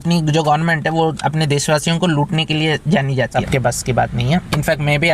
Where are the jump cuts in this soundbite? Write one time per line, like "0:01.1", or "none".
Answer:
0:03.3